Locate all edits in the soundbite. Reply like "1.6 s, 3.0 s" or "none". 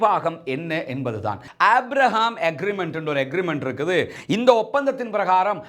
1.5 s